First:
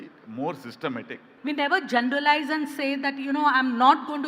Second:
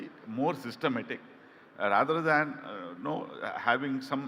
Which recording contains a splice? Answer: first; 1 cut; at 1.2 s

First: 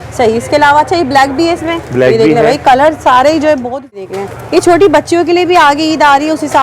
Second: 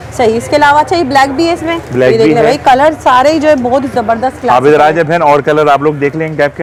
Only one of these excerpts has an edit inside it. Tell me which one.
first; 1 cut; at 4.0 s

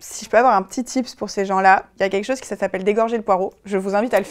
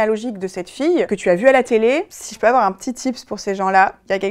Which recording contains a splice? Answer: second; 1 cut; at 1.1 s

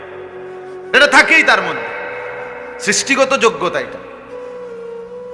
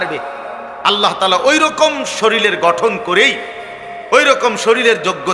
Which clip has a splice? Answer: first; 1 cut; at 1.0 s

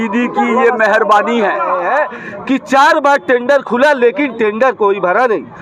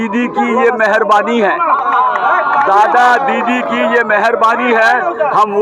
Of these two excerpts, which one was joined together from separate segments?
first; 1 cut; at 1.7 s

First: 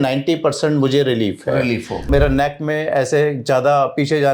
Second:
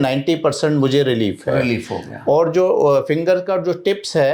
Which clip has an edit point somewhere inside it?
first; 1 cut; at 2.1 s

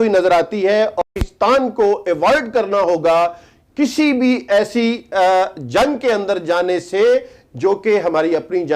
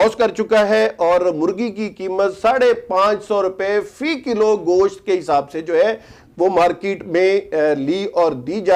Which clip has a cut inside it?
first; 1 cut; at 1.0 s

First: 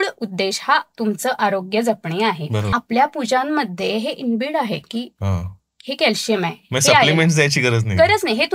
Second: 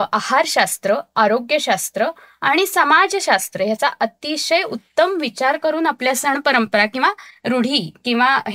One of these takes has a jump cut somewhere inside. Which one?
first; 1 cut; at 2.7 s

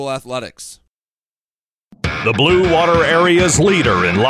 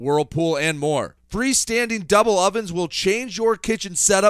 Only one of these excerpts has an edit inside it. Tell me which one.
first; 1 cut; at 1.4 s

